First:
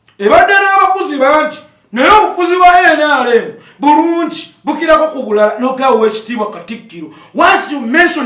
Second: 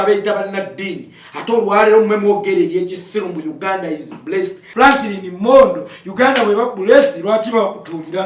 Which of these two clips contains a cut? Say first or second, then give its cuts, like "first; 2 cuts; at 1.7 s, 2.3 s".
second; 1 cut; at 4.6 s